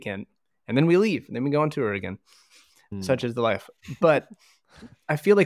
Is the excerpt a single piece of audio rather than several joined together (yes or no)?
yes